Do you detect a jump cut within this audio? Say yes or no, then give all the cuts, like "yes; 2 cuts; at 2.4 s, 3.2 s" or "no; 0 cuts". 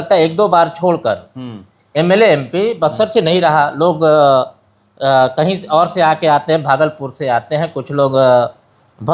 no; 0 cuts